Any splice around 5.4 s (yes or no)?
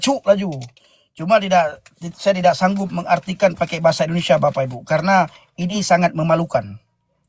yes